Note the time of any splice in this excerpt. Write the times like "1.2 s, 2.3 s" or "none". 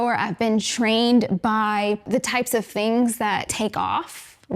3.5 s